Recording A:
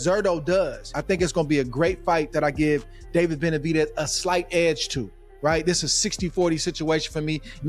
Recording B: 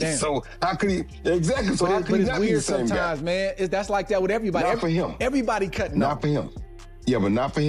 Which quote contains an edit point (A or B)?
A